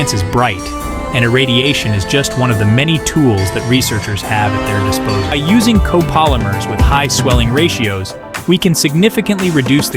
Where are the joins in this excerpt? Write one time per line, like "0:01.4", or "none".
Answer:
0:05.3